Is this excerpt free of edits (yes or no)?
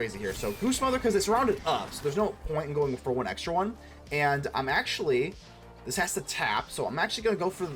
yes